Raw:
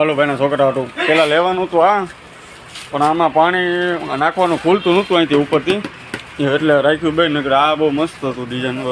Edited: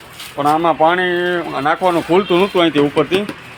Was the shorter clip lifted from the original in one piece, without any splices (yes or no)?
yes